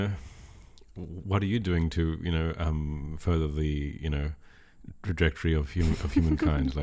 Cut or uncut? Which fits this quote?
uncut